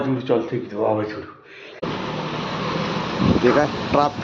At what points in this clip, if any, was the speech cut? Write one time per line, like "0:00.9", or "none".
0:01.8